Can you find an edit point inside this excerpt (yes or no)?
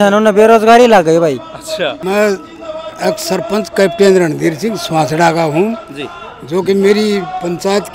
no